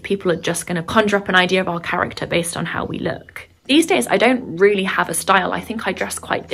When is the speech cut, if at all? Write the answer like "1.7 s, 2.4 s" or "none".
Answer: none